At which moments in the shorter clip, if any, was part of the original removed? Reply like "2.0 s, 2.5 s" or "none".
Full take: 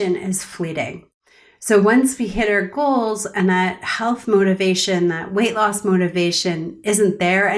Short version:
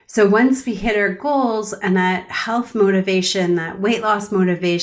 none